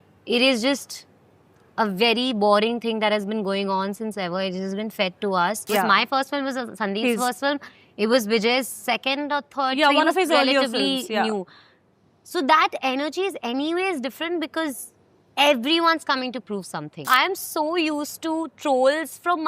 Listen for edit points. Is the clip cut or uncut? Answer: cut